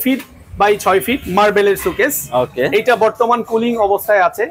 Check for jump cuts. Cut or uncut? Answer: uncut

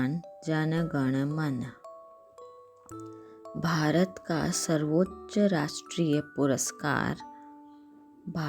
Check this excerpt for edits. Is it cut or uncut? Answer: cut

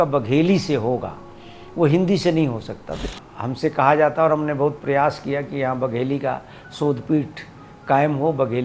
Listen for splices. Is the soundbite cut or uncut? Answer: cut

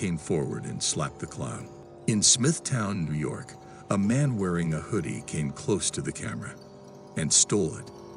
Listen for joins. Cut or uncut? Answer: cut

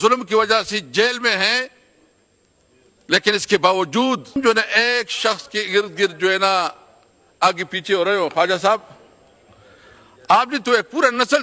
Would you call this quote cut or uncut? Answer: cut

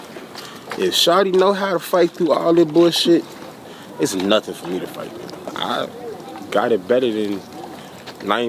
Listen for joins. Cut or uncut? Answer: cut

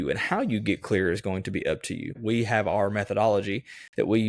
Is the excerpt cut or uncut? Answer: cut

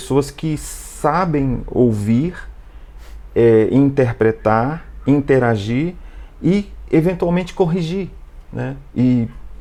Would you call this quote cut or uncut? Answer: uncut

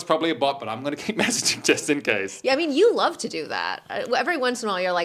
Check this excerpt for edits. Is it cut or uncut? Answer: uncut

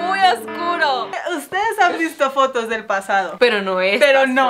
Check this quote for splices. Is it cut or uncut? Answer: cut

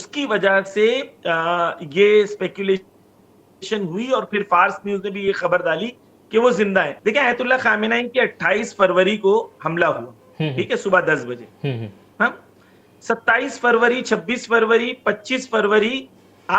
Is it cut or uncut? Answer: cut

